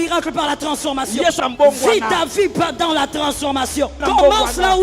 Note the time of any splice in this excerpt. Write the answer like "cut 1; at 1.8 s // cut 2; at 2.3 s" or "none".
cut 1; at 1.4 s // cut 2; at 4.0 s